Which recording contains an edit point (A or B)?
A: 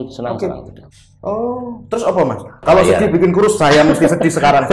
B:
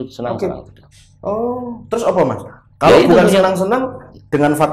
A